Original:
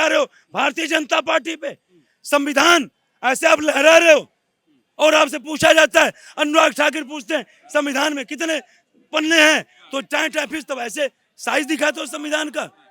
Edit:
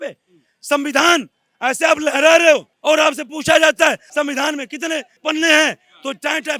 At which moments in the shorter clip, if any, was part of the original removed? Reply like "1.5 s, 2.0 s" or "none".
2.7 s, 4.0 s, 5.1 s